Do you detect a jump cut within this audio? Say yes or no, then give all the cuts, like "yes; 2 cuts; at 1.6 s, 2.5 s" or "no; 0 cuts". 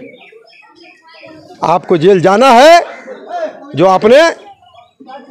no; 0 cuts